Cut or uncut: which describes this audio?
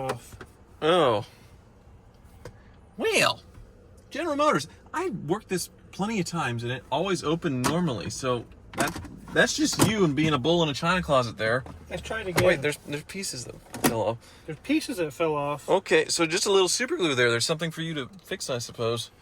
uncut